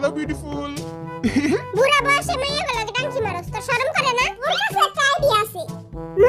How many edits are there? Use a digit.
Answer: 1